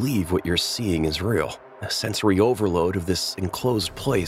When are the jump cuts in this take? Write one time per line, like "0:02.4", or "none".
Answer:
none